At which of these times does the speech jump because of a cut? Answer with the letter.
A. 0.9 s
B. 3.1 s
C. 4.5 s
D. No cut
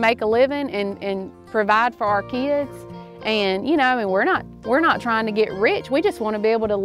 D